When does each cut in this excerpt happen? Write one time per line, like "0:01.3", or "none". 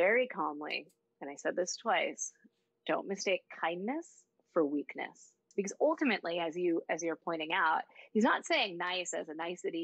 0:05.4